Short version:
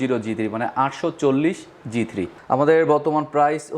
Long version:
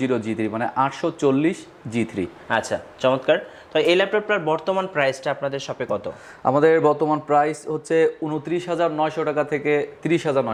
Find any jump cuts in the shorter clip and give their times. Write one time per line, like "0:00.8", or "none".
0:02.4